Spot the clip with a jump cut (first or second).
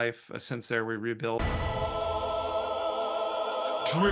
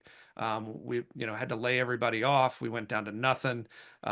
first